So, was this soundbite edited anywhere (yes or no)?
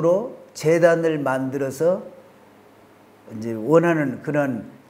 no